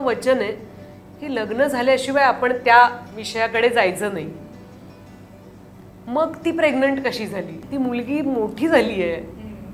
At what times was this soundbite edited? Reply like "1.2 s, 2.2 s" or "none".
7.6 s